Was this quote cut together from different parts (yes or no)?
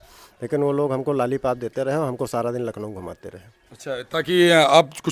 no